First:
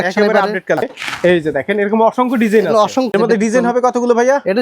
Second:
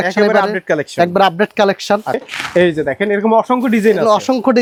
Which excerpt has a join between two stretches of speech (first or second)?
first